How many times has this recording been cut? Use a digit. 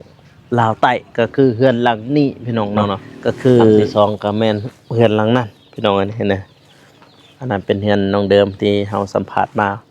1